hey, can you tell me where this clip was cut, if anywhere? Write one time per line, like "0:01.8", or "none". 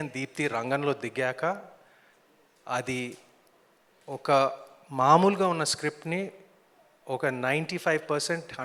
none